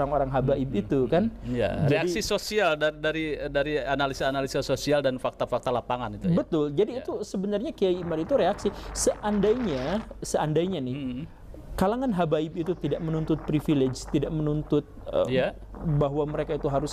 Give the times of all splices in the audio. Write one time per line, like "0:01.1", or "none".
none